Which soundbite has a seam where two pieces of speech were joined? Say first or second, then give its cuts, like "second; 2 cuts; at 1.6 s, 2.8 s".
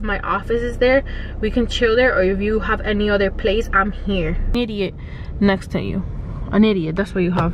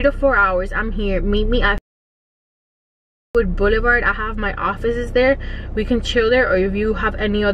first; 1 cut; at 4.4 s